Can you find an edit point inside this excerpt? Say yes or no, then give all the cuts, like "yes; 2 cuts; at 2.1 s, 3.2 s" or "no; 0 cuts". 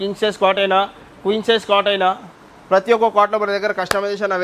no; 0 cuts